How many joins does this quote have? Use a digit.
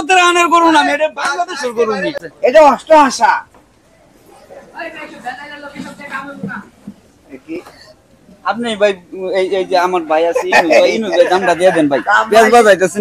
1